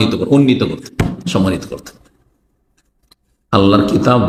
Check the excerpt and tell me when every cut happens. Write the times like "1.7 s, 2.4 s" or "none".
none